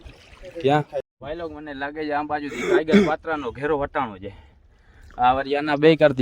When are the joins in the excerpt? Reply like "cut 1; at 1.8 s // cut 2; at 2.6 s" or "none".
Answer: cut 1; at 1.1 s